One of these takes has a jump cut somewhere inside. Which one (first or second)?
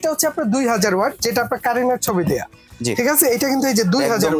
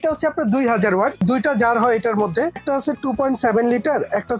second